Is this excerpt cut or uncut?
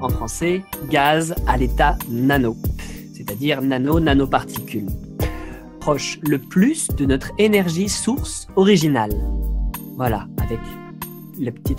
uncut